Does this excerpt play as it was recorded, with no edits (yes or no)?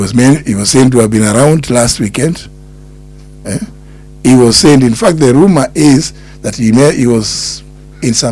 yes